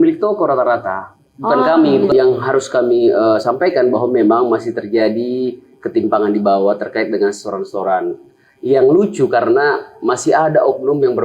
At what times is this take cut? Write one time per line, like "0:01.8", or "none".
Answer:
0:02.1